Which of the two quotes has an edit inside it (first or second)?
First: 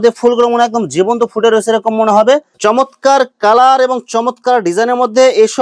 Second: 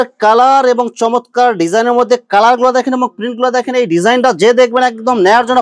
first